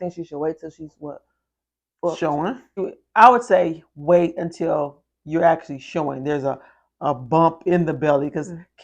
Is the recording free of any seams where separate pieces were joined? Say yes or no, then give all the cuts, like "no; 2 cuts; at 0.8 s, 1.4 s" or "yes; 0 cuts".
no; 1 cut; at 2.8 s